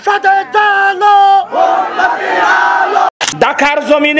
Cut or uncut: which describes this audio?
cut